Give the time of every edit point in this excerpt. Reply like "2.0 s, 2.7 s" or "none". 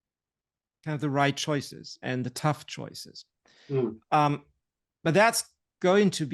none